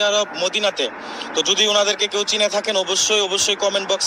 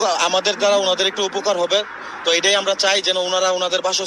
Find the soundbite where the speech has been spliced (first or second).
second